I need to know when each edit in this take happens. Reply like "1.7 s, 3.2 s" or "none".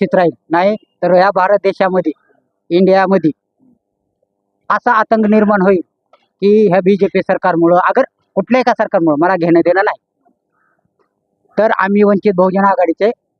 none

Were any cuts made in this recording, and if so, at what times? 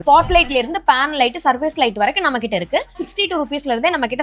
2.9 s

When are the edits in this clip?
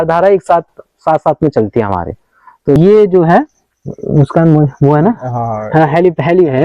2.8 s

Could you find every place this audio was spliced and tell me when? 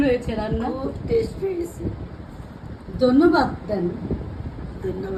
none

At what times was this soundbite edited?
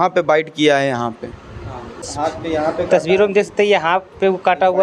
2.1 s

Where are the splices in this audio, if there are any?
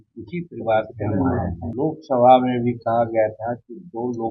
1.6 s

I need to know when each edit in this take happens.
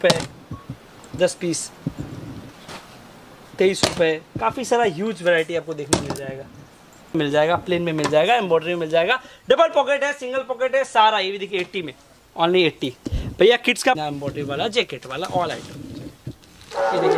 7.1 s, 14.0 s

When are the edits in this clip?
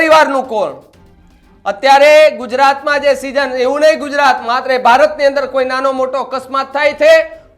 none

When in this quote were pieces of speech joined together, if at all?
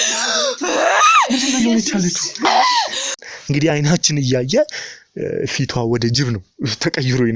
3.3 s

